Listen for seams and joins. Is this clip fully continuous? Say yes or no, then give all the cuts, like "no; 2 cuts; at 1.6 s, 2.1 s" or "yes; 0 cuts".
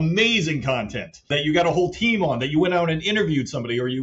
no; 1 cut; at 1.3 s